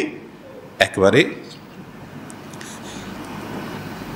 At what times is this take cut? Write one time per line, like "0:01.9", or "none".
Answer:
0:02.1